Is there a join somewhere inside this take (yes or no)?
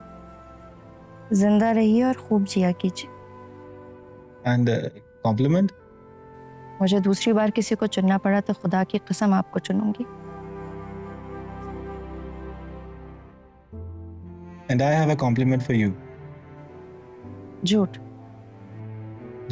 no